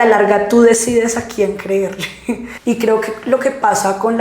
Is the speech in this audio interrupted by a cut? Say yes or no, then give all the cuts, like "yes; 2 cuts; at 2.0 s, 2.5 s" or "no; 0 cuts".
yes; 1 cut; at 2.5 s